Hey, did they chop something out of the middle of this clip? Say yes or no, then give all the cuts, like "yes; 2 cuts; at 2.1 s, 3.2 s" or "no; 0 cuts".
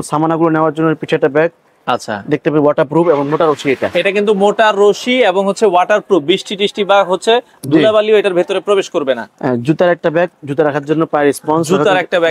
no; 0 cuts